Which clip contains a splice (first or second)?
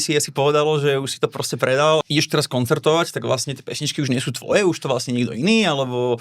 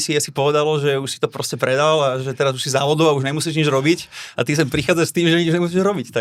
first